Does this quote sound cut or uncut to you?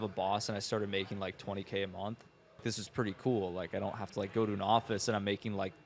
cut